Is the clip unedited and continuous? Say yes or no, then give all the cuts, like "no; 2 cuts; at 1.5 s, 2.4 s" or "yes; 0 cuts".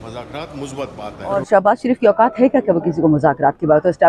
no; 1 cut; at 1.3 s